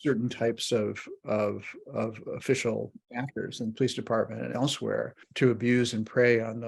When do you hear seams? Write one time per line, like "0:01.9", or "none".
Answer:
0:05.3